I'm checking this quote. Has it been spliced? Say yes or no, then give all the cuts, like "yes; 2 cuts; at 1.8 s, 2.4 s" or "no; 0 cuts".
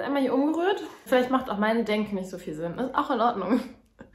yes; 1 cut; at 1.1 s